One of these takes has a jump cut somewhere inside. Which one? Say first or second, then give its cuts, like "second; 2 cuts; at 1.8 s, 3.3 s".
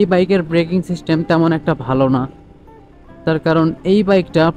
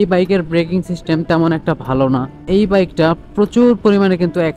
second; 1 cut; at 2.4 s